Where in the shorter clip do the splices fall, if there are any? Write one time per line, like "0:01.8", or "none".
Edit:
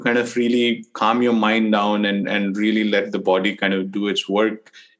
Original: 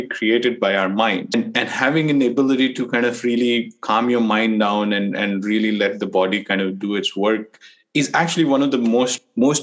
none

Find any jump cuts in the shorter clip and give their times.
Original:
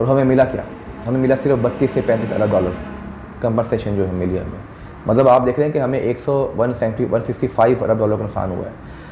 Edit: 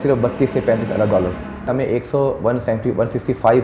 0:01.7

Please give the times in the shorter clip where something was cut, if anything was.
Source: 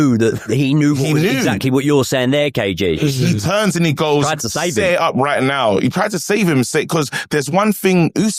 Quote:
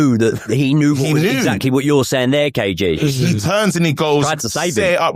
none

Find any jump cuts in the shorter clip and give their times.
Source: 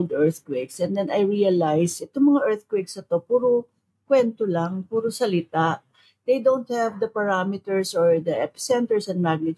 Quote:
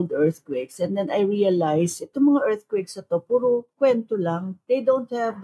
0:04.1

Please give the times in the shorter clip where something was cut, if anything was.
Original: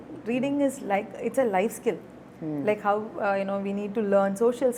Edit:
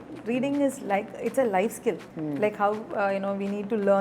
0:02.1

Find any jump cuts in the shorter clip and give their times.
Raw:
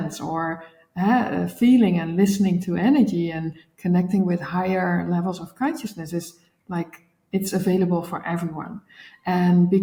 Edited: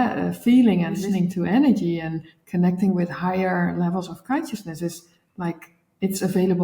0:01.0

